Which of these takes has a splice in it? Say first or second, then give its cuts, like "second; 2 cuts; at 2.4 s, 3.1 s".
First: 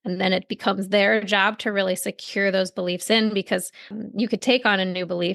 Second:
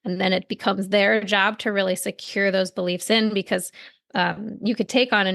first; 1 cut; at 4.0 s